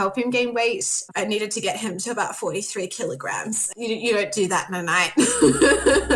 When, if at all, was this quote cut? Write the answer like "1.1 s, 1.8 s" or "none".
1.0 s, 3.7 s